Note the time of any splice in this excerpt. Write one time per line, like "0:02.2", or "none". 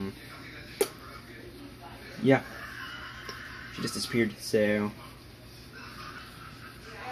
0:06.2